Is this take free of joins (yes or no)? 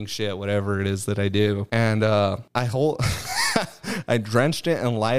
no